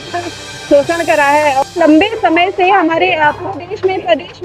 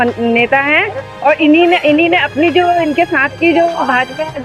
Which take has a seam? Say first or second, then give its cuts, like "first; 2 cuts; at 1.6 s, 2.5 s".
first; 1 cut; at 1.7 s